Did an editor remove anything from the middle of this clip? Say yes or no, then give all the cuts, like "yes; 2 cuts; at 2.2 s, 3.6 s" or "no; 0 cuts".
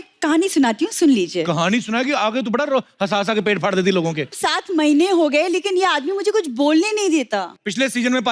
yes; 1 cut; at 4.3 s